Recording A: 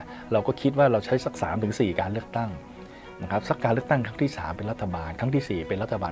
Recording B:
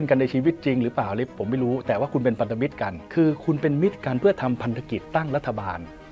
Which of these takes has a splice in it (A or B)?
B